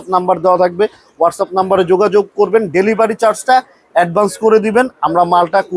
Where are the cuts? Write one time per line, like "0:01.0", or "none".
none